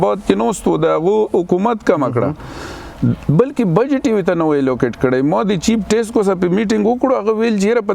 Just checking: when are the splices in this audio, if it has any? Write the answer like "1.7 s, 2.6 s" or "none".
none